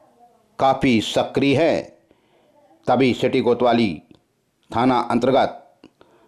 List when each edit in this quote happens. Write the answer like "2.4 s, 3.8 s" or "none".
none

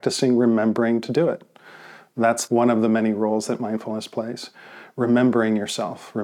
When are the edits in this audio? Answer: 2.4 s

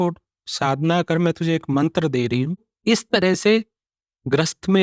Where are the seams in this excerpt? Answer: 2.7 s

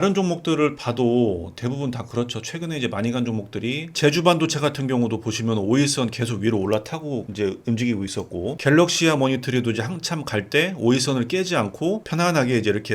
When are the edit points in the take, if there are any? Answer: 3.9 s, 12.0 s

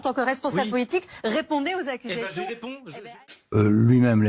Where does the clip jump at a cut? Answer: 3.1 s

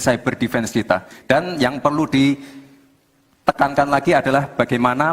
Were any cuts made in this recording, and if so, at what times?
1.1 s

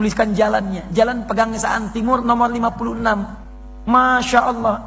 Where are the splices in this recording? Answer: none

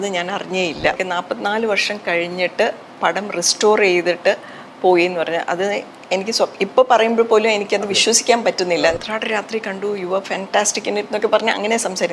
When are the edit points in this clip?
1.0 s, 9.0 s

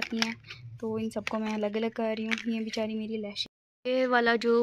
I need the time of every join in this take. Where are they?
3.4 s

